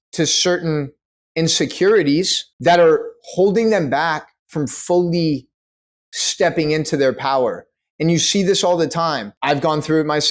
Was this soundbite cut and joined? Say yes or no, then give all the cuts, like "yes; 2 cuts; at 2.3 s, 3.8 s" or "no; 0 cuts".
yes; 2 cuts; at 2.4 s, 9.3 s